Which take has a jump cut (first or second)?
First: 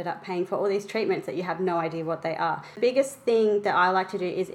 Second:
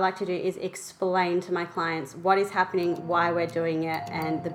first